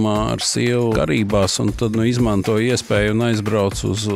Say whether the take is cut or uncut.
cut